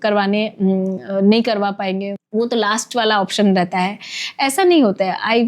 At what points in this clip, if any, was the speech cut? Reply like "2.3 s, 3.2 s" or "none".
2.2 s